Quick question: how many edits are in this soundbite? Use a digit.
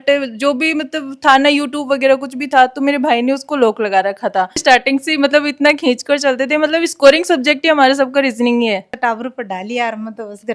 2